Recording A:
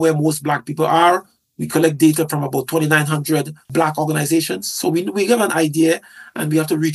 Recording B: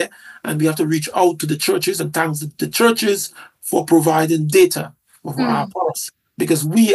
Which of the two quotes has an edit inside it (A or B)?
A